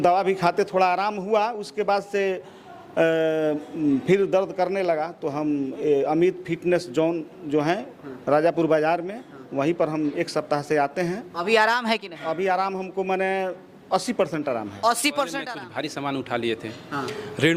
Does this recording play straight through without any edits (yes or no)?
no